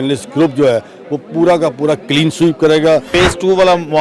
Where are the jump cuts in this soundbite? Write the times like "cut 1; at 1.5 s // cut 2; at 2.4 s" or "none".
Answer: cut 1; at 3.1 s